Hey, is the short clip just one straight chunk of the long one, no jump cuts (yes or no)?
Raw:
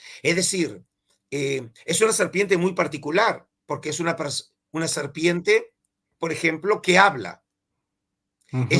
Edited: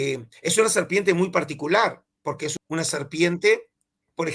no